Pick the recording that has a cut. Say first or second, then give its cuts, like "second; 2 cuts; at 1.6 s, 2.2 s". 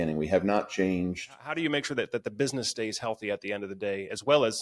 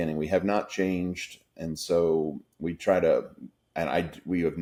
first; 1 cut; at 1.5 s